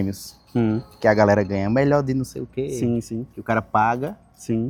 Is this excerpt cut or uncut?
uncut